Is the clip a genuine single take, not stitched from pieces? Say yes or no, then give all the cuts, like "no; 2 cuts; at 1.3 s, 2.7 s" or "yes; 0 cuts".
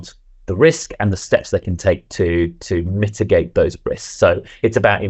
yes; 0 cuts